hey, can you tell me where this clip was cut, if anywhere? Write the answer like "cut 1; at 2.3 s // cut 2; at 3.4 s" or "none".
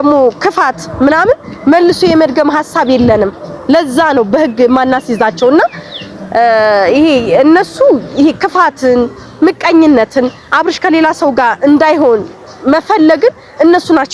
none